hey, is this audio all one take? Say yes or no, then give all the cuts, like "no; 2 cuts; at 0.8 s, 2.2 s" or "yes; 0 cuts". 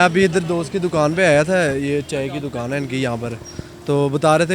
yes; 0 cuts